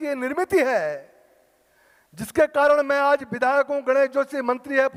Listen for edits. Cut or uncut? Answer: uncut